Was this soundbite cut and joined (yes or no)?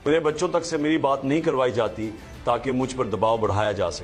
no